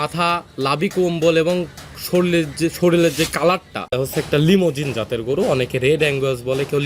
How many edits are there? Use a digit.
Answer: 1